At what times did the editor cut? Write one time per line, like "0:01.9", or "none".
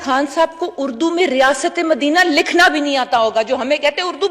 none